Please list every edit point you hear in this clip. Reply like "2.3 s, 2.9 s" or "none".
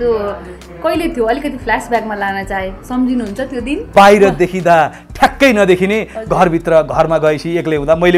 3.9 s